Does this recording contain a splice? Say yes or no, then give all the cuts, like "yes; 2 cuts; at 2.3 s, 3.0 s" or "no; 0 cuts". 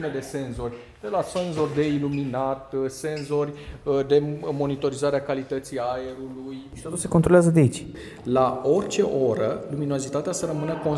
yes; 2 cuts; at 6.7 s, 7.9 s